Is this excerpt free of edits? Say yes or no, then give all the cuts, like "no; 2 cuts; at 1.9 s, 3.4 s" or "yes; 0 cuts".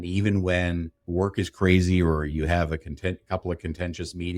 no; 1 cut; at 1.0 s